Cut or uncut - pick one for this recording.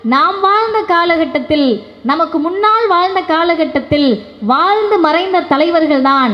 uncut